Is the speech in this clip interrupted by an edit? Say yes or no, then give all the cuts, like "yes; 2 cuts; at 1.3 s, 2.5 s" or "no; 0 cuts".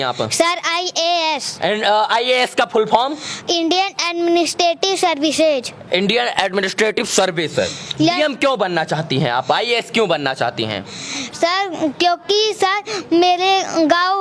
no; 0 cuts